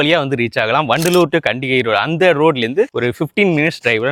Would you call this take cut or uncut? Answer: uncut